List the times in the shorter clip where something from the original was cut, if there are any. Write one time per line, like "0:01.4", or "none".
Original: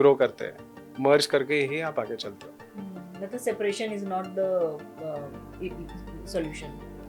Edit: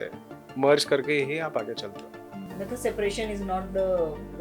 0:02.4